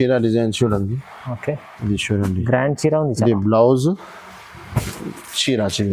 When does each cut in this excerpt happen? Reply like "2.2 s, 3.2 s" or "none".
1.7 s